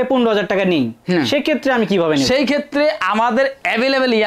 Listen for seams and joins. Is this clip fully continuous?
yes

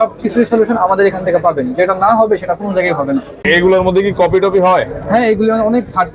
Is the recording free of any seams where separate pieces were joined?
no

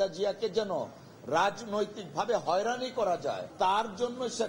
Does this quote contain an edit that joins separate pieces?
yes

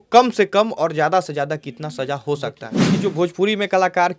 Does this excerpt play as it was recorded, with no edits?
no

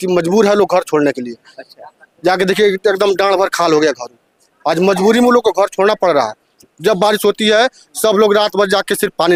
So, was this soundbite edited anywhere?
no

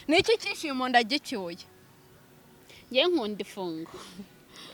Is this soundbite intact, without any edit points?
yes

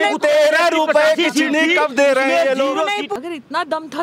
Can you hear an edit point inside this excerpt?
yes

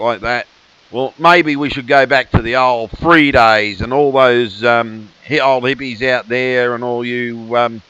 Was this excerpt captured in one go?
no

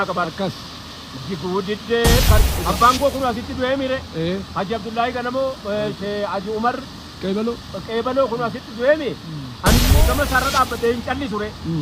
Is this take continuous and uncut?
no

